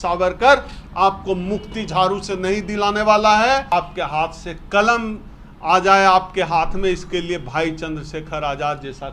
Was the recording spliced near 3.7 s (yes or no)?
yes